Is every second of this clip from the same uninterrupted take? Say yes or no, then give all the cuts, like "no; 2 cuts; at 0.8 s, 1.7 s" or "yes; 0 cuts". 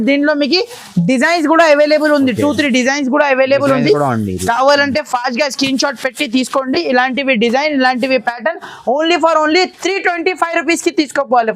yes; 0 cuts